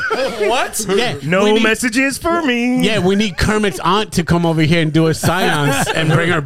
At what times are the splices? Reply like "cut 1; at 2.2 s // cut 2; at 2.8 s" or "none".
none